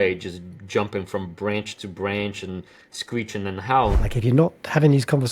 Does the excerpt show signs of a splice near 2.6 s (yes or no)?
no